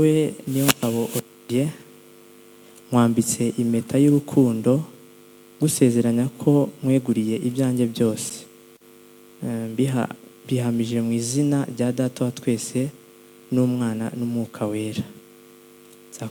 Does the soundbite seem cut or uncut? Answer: uncut